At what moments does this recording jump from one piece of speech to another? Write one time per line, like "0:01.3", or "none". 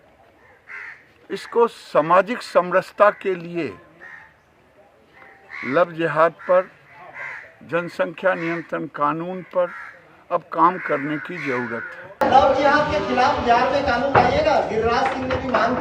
0:12.2